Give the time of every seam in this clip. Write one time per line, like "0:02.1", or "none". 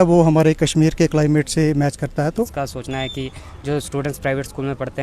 0:02.3